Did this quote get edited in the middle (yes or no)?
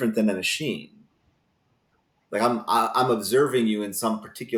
no